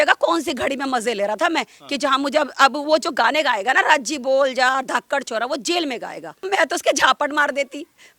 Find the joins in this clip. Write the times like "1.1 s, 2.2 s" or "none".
6.3 s

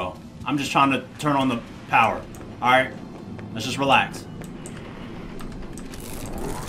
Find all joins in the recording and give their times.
none

